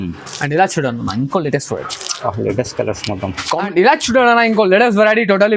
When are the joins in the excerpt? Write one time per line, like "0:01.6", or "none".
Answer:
0:03.6